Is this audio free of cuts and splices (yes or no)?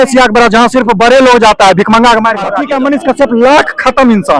no